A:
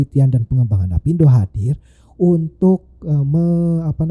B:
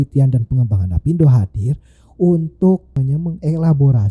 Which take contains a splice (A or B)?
B